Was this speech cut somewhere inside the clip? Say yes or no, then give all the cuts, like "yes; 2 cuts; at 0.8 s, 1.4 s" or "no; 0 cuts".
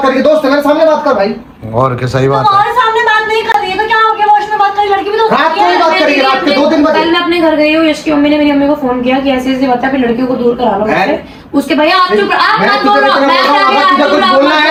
no; 0 cuts